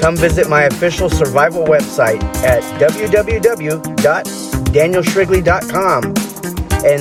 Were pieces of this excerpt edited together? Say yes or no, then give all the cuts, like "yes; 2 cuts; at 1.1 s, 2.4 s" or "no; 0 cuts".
no; 0 cuts